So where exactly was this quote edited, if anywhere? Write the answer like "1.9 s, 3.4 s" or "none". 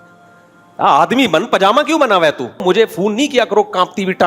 2.6 s